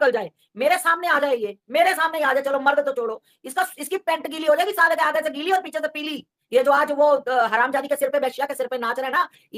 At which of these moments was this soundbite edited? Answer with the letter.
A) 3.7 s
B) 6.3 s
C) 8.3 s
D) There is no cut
B